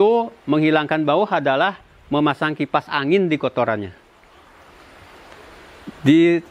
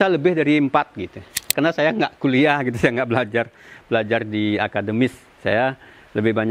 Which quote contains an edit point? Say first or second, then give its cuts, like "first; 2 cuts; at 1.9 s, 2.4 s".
second; 1 cut; at 1.5 s